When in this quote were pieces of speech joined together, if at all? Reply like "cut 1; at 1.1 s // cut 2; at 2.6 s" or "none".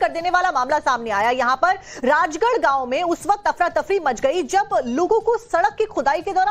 cut 1; at 1.1 s